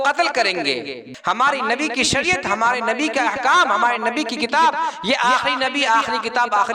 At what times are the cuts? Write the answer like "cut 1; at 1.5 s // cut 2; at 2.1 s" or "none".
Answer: cut 1; at 1.0 s